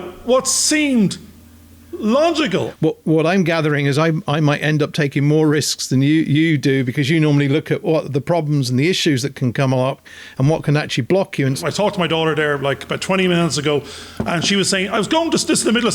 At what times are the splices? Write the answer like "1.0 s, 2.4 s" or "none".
2.7 s, 11.6 s